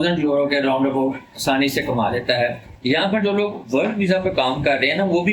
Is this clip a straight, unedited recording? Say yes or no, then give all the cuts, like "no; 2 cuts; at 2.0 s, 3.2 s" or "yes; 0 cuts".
no; 1 cut; at 2.7 s